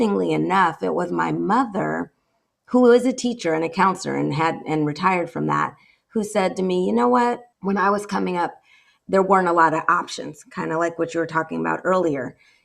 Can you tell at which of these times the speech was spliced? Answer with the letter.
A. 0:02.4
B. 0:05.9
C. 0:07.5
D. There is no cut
C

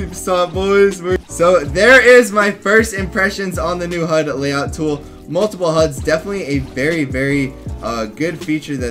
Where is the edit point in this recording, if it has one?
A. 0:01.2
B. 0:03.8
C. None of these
A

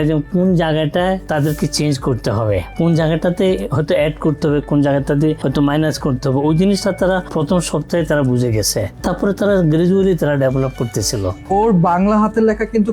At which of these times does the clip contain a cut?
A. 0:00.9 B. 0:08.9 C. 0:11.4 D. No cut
C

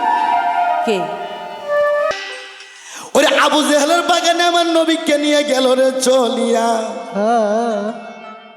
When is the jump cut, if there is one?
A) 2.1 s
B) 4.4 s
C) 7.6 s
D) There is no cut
A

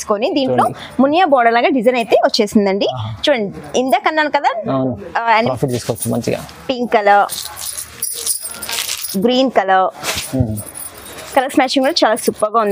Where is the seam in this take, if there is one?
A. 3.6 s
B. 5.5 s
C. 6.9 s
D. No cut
B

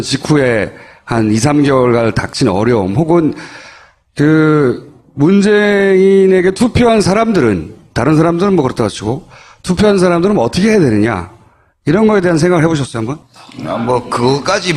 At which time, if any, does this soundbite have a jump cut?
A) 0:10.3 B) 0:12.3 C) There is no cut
C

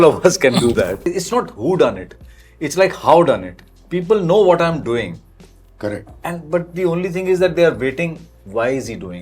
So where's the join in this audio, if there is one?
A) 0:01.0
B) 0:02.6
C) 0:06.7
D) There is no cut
A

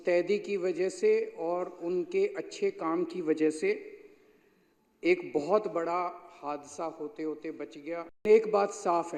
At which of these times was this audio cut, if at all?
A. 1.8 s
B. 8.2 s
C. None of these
B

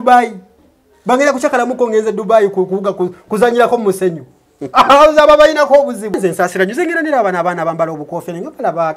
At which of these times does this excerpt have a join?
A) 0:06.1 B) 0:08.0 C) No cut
A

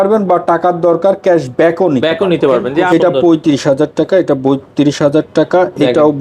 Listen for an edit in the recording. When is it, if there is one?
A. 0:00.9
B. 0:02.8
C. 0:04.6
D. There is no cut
B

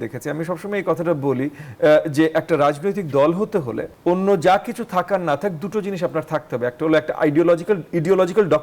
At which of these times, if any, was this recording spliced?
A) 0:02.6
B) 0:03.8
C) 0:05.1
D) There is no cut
B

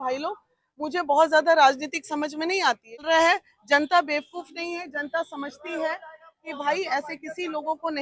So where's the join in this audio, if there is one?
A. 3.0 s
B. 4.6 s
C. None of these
A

